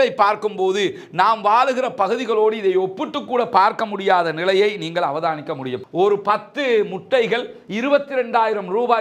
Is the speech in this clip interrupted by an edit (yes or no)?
yes